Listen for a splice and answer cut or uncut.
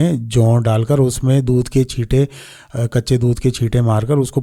uncut